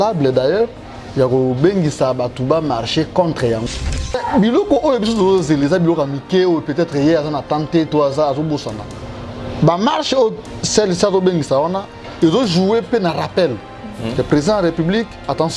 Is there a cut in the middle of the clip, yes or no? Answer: yes